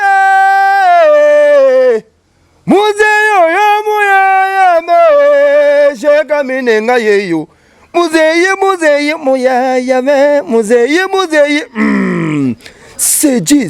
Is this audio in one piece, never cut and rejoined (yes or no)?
yes